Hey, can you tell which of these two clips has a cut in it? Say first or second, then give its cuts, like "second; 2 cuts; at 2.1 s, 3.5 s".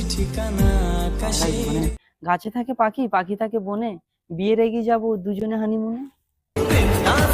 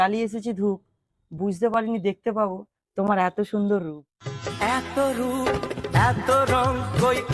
first; 1 cut; at 2.1 s